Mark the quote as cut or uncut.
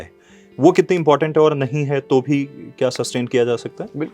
uncut